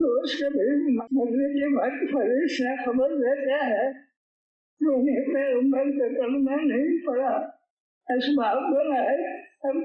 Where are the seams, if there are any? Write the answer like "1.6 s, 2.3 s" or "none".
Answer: 1.0 s